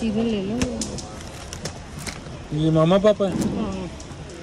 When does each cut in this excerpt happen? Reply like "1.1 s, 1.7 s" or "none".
none